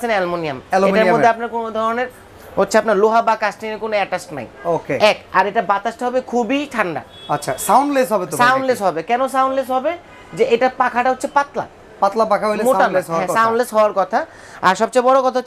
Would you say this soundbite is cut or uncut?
uncut